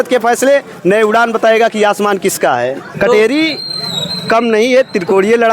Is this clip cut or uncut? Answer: cut